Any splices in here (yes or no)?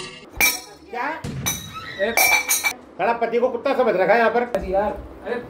yes